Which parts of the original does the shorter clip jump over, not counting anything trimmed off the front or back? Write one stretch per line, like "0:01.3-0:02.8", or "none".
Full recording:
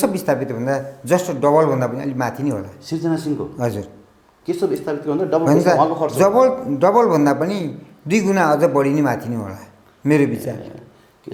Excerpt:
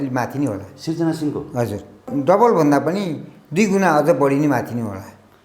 0:04.1-0:06.6